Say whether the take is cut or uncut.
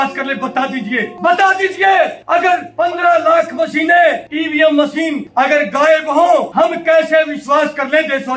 cut